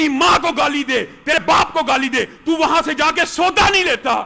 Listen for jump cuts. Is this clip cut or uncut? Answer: cut